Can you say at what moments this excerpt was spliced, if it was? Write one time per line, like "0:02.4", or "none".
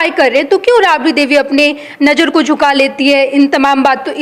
none